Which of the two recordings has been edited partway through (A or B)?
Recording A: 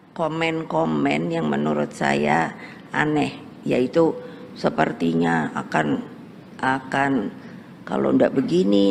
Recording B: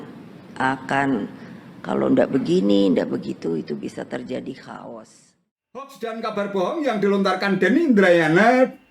B